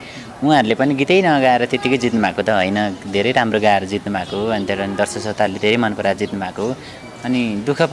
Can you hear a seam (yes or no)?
no